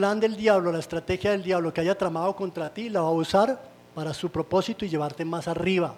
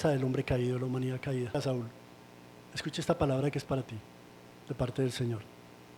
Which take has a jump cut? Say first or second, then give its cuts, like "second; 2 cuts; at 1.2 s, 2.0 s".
second; 1 cut; at 1.5 s